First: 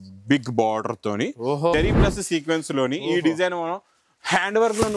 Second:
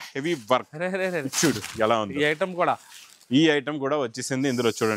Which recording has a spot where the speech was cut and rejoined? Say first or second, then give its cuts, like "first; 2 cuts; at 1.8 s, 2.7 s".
first; 1 cut; at 1.7 s